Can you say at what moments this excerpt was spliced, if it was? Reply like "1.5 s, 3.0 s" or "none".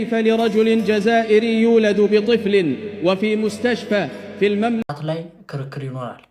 4.8 s